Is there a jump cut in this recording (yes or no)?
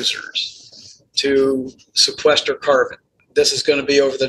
yes